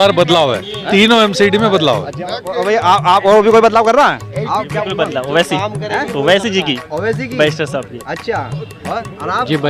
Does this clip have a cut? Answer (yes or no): no